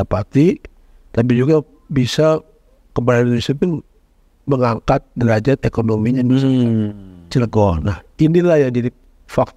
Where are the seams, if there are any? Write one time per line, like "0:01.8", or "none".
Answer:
none

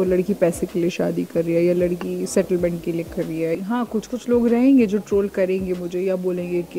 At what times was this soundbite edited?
0:03.6

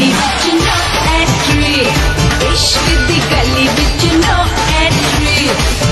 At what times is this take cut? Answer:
none

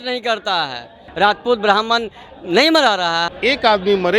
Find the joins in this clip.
0:01.0
0:03.3

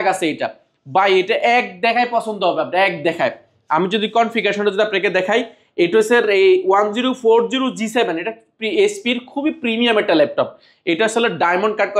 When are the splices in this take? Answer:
none

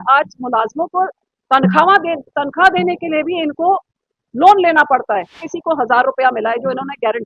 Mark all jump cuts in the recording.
0:05.5

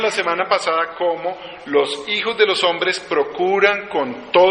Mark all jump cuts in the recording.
none

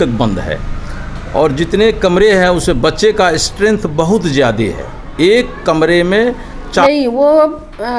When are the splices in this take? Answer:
0:06.8

